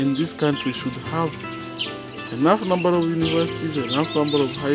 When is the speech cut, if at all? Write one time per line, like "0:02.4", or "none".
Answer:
none